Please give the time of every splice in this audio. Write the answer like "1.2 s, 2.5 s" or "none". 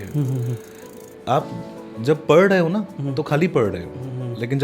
none